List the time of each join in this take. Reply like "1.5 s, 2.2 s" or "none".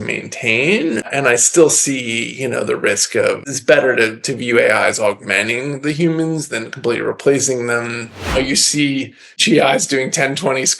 8.3 s